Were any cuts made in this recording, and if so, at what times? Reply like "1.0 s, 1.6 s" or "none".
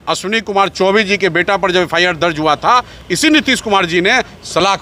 none